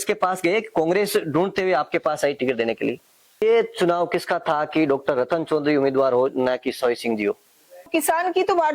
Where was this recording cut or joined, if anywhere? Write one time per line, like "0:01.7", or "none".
0:03.4
0:07.9